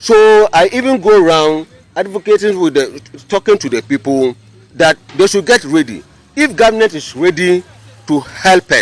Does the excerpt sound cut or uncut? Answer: uncut